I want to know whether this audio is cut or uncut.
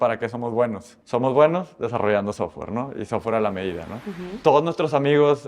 cut